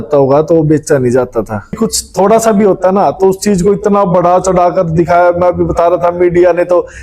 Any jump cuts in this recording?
yes; 1 cut; at 1.8 s

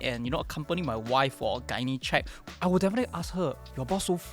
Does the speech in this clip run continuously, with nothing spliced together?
no; 1 cut; at 2.4 s

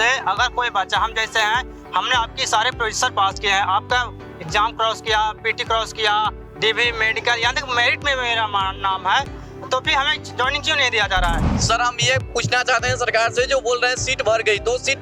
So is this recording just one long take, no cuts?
no; 1 cut; at 11.5 s

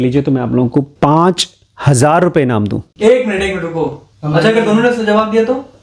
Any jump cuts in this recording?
no; 0 cuts

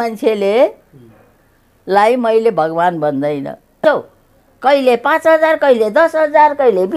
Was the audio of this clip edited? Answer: yes; 1 cut; at 3.8 s

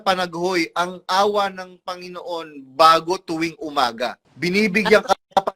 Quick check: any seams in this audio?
yes; 1 cut; at 4.3 s

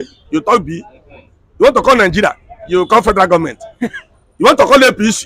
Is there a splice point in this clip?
no; 0 cuts

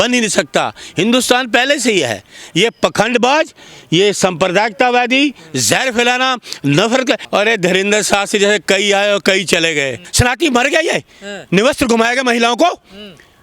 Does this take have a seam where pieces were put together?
yes; 2 cuts; at 7.2 s, 10.1 s

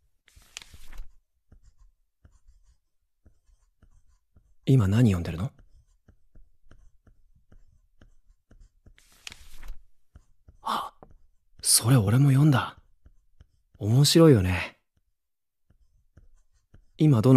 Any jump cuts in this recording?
yes; 1 cut; at 16.4 s

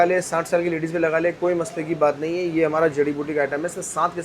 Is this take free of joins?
yes; 0 cuts

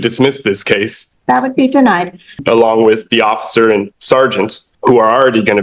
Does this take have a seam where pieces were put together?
yes; 3 cuts; at 1.0 s, 2.4 s, 4.6 s

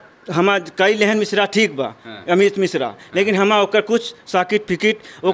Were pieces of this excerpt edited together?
no; 0 cuts

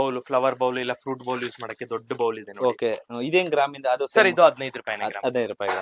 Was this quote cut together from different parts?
no; 0 cuts

